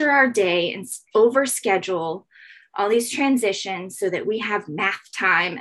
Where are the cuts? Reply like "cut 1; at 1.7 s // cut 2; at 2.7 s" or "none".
none